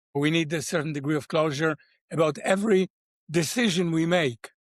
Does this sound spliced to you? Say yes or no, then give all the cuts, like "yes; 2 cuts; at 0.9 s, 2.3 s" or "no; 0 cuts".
no; 0 cuts